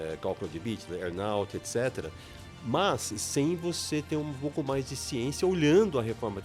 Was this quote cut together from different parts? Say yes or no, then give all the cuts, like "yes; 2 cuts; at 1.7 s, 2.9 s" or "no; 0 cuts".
no; 0 cuts